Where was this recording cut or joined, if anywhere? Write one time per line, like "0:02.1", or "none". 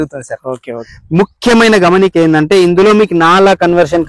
0:00.9